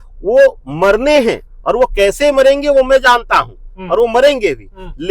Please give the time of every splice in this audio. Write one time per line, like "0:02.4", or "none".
none